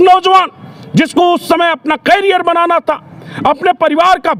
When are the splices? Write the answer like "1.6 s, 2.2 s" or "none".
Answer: none

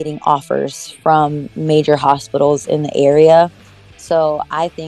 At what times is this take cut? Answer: none

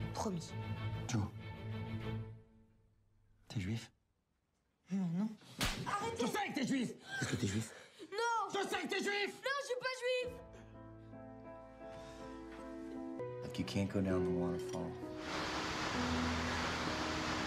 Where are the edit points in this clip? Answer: 13.2 s

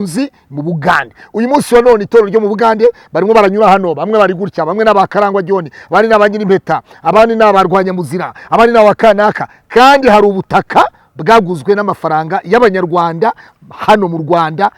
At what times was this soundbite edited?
none

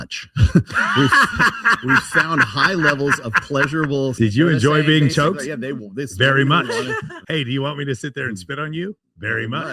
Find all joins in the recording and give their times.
4.1 s, 7.2 s

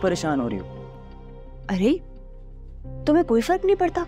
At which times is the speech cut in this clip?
none

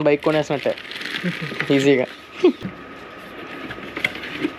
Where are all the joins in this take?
2.6 s

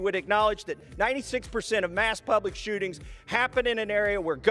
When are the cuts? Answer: none

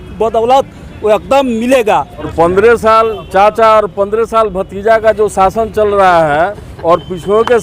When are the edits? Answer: 2.3 s

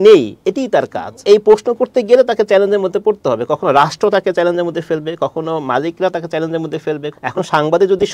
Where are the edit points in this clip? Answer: 1.2 s, 7.3 s

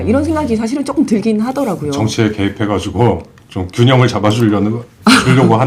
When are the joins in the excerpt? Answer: none

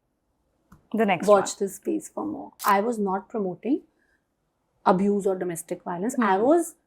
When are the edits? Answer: 2.6 s

